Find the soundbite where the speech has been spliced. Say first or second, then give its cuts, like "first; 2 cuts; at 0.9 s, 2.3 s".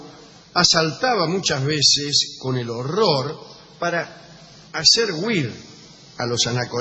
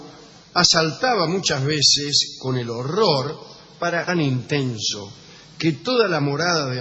first; 1 cut; at 4.1 s